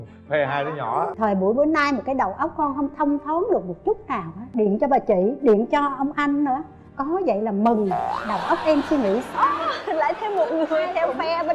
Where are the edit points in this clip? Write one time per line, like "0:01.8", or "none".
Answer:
0:01.1
0:04.5